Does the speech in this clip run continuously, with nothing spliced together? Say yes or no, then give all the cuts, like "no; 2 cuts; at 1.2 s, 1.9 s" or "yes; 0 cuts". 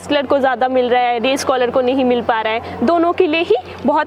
yes; 0 cuts